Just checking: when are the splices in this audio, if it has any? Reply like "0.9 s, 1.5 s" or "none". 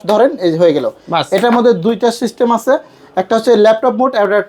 none